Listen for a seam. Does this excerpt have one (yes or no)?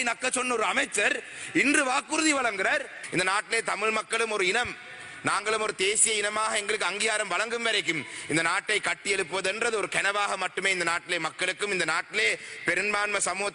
yes